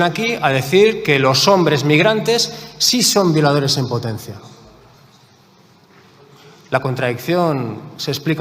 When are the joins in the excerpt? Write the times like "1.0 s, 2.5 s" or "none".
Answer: none